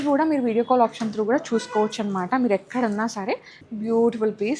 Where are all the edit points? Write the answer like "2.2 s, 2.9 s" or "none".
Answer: 3.6 s